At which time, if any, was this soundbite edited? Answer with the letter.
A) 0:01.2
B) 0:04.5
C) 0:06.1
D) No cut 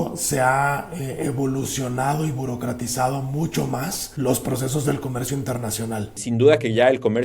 C